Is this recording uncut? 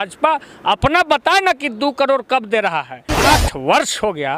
no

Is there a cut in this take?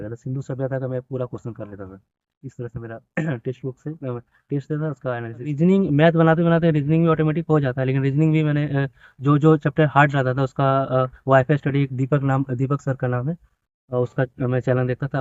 yes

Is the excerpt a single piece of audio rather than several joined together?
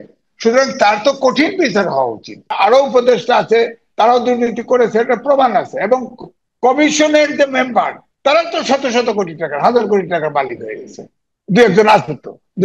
no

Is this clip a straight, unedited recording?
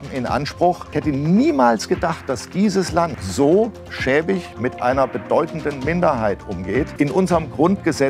no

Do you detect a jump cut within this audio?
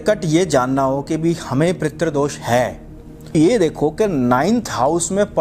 yes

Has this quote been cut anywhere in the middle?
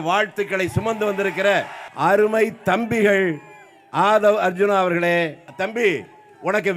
yes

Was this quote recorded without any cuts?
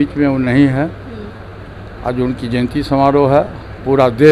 yes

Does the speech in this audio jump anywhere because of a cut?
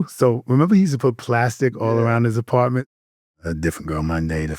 yes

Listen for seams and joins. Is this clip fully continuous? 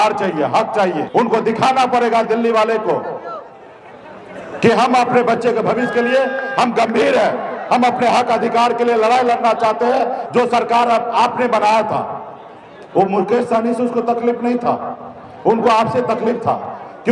no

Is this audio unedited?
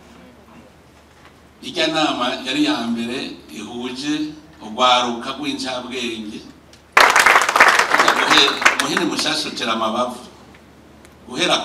no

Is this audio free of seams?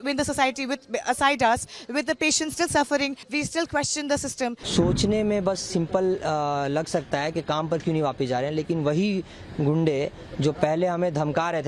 no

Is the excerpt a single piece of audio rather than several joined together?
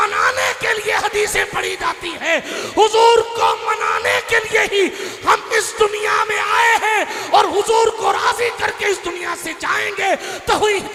yes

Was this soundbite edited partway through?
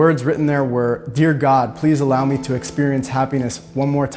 no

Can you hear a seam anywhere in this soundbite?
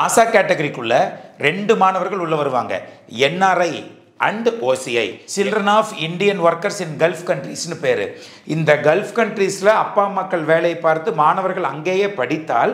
yes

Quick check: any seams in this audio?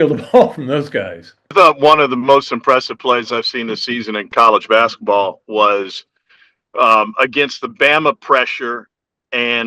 yes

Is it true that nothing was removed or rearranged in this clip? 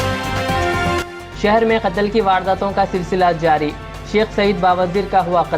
no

